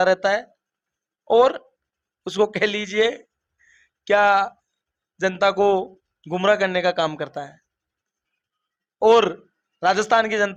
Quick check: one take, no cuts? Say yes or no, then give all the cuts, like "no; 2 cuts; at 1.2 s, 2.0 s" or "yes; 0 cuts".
yes; 0 cuts